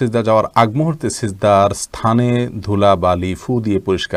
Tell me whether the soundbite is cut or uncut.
uncut